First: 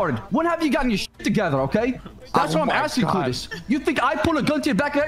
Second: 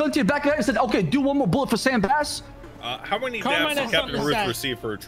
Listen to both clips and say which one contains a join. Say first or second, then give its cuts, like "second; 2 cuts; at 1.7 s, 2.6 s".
second; 1 cut; at 2.5 s